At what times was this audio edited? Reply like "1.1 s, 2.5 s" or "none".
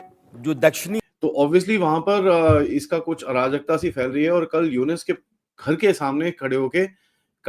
1.0 s